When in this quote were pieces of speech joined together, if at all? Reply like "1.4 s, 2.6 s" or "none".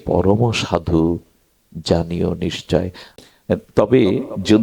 3.1 s